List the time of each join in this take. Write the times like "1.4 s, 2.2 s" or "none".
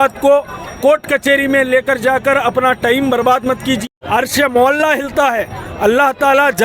3.8 s